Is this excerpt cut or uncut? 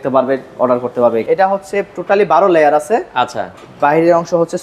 cut